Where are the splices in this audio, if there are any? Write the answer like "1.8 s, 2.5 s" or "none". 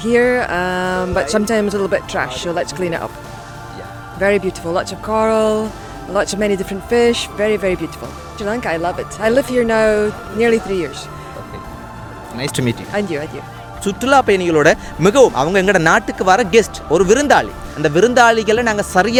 none